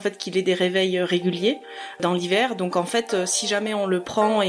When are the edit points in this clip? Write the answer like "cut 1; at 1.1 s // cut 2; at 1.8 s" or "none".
none